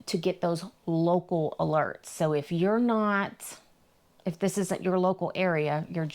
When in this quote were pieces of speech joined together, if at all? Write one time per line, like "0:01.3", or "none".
none